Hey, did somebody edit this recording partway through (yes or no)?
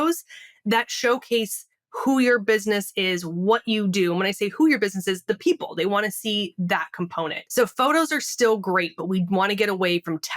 yes